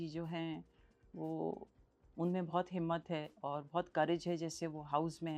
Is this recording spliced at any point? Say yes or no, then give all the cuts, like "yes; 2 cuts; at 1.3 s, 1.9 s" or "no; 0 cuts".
no; 0 cuts